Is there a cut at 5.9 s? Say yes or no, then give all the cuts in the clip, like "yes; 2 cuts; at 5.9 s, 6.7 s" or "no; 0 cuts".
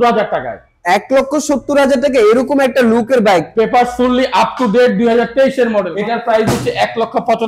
yes; 1 cut; at 5.9 s